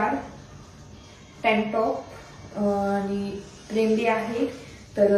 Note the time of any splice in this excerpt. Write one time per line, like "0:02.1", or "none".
none